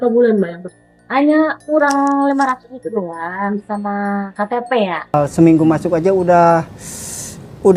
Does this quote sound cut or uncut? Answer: cut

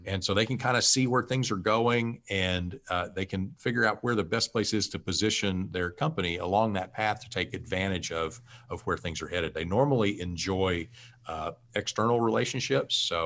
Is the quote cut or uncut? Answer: uncut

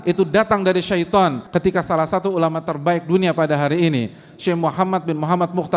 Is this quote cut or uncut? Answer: cut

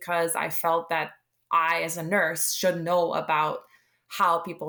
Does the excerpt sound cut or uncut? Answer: uncut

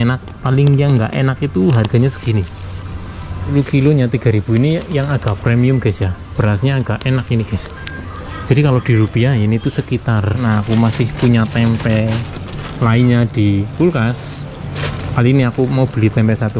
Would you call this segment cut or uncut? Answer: cut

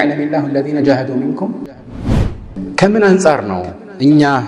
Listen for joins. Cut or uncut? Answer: cut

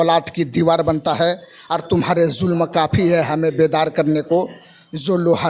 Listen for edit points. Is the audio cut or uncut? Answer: uncut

